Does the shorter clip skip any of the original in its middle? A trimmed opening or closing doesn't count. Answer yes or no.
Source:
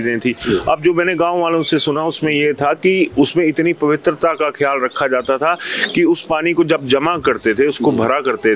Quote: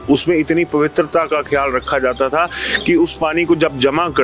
no